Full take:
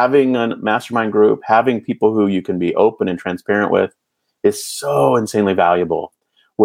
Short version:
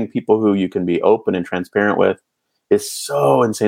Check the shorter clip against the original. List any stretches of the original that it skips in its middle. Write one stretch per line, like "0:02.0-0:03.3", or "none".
none